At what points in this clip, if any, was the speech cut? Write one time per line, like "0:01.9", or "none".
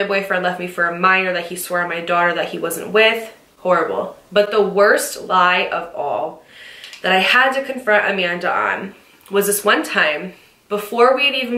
none